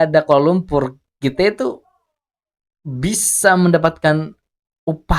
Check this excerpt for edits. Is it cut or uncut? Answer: uncut